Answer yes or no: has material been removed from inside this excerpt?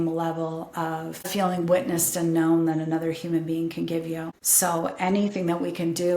yes